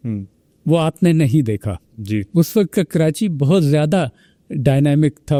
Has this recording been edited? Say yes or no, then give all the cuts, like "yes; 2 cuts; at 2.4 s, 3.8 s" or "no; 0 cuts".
no; 0 cuts